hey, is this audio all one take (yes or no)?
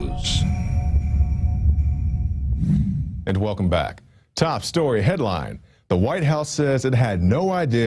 yes